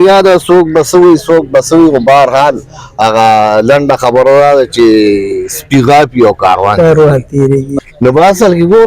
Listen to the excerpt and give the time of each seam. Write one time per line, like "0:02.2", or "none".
0:07.9